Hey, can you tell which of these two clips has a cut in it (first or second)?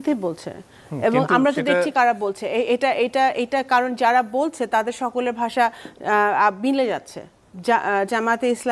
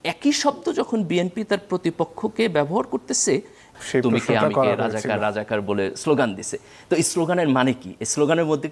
second